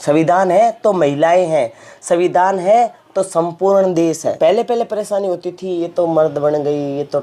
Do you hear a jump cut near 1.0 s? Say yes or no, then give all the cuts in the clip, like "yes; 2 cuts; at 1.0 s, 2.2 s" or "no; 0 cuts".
no; 1 cut; at 4.4 s